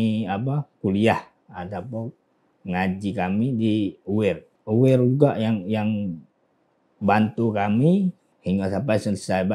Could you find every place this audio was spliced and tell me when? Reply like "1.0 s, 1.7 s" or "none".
4.5 s, 8.3 s